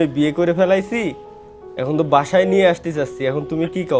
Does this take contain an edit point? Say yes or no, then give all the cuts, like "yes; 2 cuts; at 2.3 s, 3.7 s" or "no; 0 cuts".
no; 0 cuts